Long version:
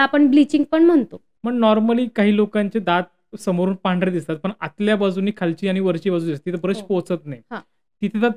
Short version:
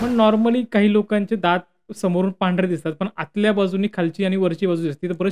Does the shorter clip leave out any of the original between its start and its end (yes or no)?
no